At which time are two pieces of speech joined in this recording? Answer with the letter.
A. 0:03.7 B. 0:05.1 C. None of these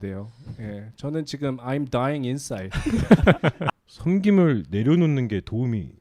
A